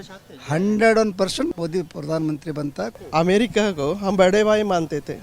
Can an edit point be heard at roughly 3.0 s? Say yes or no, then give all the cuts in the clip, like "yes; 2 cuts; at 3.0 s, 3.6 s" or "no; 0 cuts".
yes; 2 cuts; at 1.5 s, 3.0 s